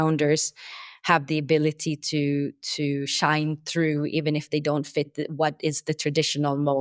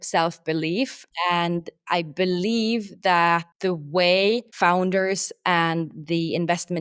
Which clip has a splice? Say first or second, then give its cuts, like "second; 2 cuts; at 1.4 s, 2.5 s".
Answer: second; 3 cuts; at 1.1 s, 3.5 s, 4.5 s